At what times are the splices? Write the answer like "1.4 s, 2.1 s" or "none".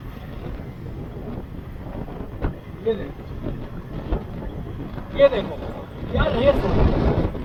none